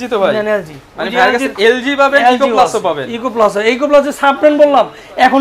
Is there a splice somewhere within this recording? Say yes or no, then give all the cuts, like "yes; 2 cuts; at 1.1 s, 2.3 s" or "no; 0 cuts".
no; 0 cuts